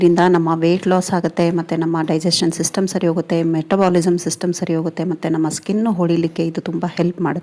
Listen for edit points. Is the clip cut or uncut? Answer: uncut